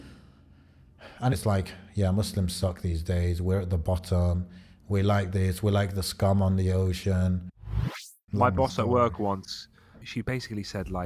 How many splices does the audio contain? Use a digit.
3